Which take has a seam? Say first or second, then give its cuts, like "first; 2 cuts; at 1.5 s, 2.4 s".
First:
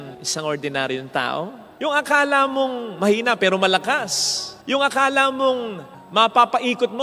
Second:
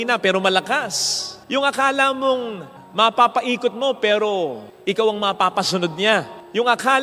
first; 1 cut; at 1.6 s